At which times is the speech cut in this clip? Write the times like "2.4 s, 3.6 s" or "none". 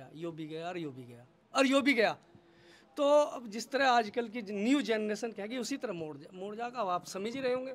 none